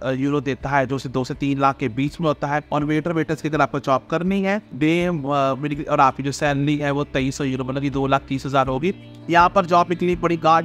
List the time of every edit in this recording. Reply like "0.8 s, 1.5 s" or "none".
2.7 s, 4.7 s, 9.1 s